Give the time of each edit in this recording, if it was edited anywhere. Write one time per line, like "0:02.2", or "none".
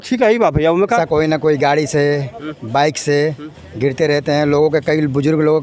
0:01.0